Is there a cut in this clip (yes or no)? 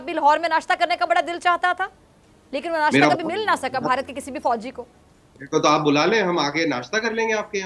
no